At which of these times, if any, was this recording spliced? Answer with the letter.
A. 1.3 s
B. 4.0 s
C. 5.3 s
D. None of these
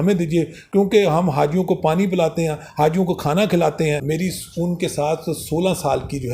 B